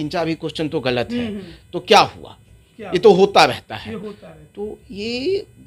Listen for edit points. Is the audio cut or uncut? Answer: uncut